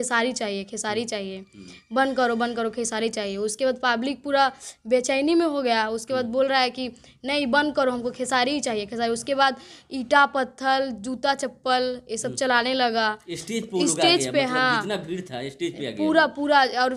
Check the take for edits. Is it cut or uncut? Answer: uncut